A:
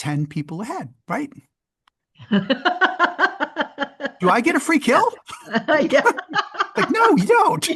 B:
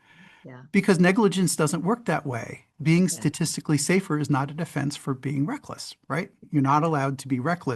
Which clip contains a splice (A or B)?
B